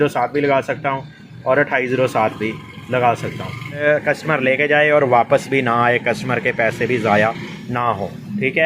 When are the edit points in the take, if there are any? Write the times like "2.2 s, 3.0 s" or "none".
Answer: 3.8 s